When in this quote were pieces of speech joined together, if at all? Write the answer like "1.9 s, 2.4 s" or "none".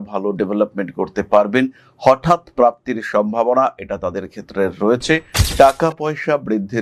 none